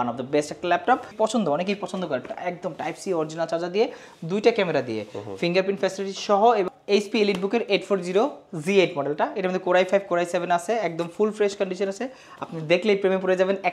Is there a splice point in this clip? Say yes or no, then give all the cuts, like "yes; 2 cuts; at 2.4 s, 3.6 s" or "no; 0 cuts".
yes; 2 cuts; at 1.1 s, 6.7 s